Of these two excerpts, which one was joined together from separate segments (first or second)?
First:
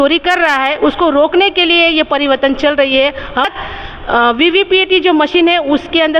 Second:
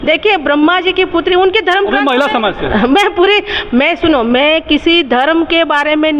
first